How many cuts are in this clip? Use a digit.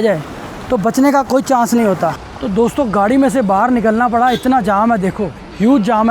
1